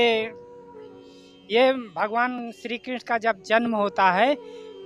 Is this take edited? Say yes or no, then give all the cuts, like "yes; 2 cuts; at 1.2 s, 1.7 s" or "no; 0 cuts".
no; 0 cuts